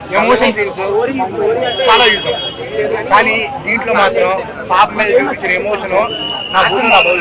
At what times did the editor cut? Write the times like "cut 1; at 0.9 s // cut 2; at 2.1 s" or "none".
none